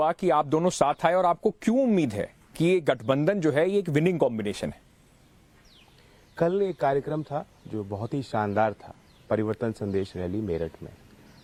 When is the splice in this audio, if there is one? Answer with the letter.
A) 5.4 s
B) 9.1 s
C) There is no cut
C